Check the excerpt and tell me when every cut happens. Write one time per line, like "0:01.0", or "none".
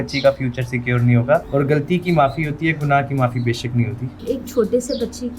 0:01.5
0:04.2